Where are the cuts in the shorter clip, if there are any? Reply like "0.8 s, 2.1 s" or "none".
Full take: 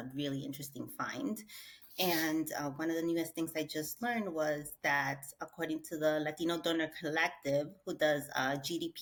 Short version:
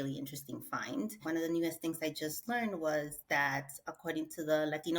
1.2 s